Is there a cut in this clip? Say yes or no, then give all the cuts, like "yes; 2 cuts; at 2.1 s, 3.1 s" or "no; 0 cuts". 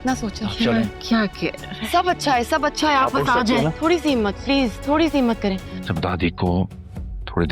yes; 1 cut; at 5.7 s